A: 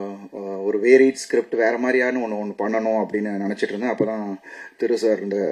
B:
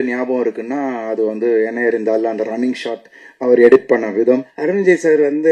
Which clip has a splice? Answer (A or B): B